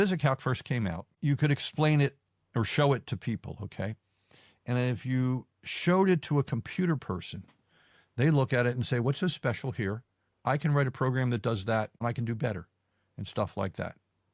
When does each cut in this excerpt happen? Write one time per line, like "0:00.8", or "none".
0:01.1
0:12.0